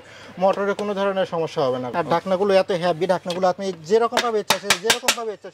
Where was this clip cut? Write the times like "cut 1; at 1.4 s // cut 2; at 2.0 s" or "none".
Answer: cut 1; at 1.9 s